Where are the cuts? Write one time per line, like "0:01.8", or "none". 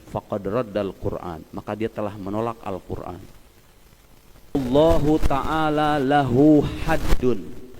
0:04.5